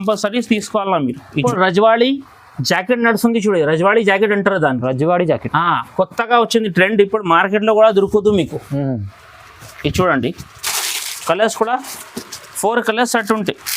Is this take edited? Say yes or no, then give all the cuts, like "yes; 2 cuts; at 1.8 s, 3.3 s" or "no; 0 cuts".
yes; 1 cut; at 1.4 s